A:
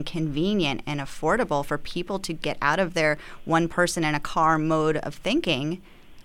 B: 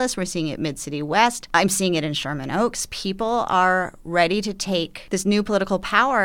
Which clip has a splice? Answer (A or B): B